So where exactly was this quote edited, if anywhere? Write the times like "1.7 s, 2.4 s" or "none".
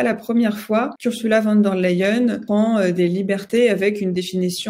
0.9 s